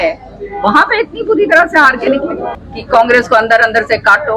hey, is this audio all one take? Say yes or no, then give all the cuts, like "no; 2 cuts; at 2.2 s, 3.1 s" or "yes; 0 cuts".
no; 1 cut; at 2.5 s